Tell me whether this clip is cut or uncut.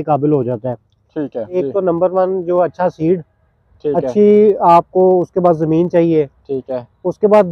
cut